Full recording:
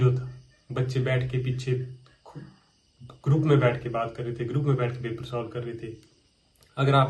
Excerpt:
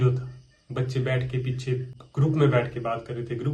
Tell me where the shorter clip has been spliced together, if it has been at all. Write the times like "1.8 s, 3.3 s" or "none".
2.0 s